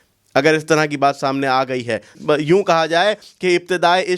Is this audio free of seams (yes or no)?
no